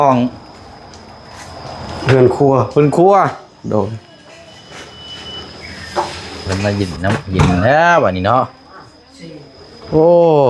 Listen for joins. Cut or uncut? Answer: cut